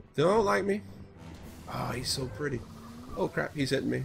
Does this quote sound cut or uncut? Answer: uncut